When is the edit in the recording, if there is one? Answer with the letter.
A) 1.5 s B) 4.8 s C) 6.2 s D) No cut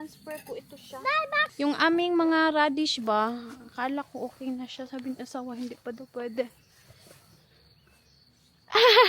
A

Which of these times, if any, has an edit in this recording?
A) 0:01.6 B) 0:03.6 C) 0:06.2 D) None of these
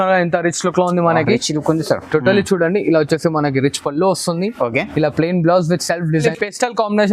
C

